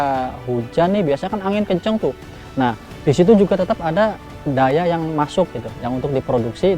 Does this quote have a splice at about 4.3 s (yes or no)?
yes